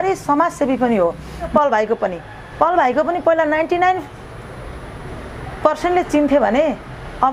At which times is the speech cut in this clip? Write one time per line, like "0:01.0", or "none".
0:01.5